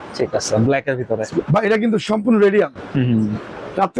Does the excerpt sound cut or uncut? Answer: uncut